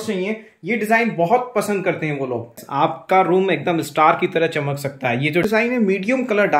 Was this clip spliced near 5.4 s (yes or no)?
yes